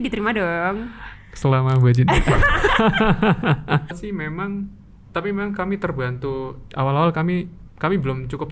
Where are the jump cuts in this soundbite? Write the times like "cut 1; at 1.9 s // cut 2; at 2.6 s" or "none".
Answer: cut 1; at 3.9 s